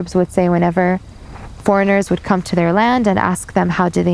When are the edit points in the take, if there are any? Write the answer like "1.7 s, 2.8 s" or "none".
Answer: none